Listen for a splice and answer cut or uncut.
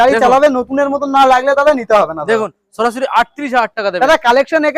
uncut